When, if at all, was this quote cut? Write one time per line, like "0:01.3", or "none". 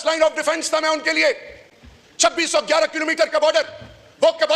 none